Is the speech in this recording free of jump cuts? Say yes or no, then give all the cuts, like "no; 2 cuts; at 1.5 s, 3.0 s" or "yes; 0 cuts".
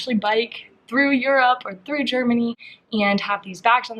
yes; 0 cuts